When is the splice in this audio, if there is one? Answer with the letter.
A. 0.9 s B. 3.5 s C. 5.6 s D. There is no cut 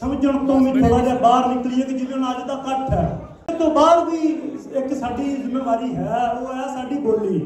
B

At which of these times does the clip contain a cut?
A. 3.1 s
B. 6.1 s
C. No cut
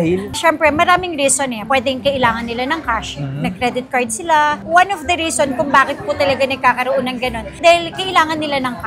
C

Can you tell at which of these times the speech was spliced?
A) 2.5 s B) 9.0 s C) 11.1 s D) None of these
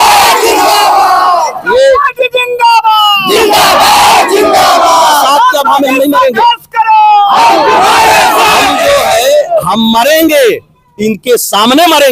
D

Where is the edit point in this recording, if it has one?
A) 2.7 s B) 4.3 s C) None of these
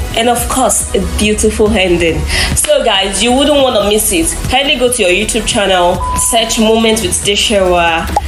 C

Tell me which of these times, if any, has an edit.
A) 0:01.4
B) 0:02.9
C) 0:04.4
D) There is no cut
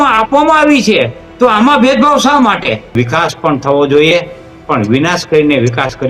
B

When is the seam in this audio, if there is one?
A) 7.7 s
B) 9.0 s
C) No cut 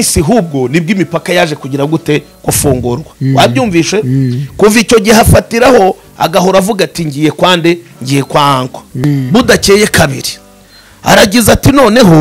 B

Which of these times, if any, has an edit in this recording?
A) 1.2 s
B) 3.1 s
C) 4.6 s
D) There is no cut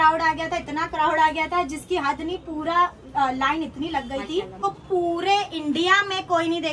C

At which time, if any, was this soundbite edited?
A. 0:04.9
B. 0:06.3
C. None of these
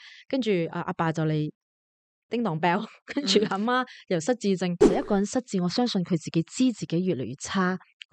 A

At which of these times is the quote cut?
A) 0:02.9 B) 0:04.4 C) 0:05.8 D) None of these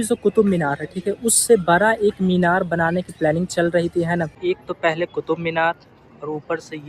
B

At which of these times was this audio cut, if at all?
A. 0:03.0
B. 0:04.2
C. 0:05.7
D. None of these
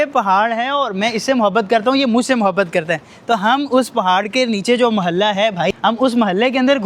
C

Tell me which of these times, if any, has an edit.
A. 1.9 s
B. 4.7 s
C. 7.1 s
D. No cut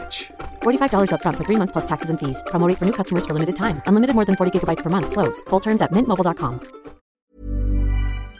C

